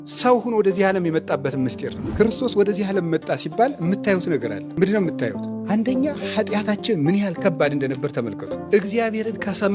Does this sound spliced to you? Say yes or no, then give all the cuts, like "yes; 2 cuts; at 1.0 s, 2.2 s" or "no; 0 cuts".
yes; 4 cuts; at 2.0 s, 4.6 s, 5.5 s, 8.6 s